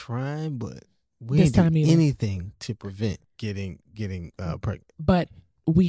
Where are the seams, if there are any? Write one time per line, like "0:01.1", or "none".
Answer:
0:03.3

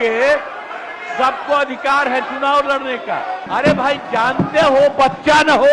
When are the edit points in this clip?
0:03.4

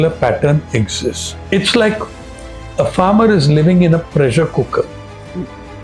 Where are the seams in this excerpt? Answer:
0:01.5

